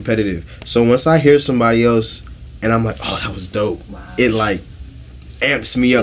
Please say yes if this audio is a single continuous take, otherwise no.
yes